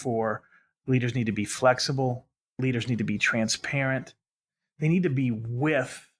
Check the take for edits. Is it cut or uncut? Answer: cut